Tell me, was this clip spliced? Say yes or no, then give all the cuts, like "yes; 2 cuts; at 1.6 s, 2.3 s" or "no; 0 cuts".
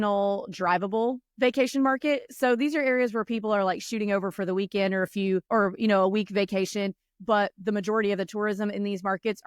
no; 0 cuts